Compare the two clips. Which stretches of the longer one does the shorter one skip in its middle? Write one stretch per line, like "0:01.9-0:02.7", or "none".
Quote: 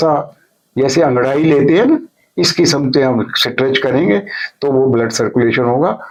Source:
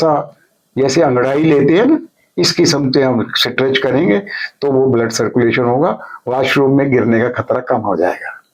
none